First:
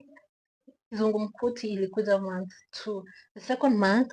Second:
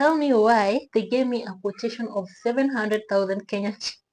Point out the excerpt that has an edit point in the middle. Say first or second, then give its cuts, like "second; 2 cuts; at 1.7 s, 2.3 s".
first; 1 cut; at 1.0 s